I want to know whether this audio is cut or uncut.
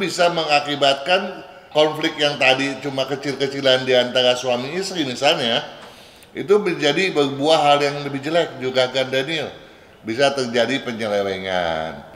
uncut